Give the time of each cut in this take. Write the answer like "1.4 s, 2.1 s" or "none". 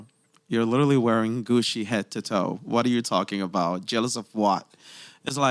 none